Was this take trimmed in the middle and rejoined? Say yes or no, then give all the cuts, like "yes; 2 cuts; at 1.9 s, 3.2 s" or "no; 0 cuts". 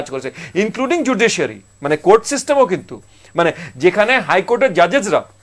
no; 0 cuts